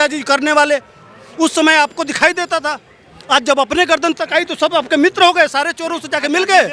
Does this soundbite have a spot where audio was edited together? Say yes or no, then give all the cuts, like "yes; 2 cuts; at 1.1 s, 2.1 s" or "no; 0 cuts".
no; 0 cuts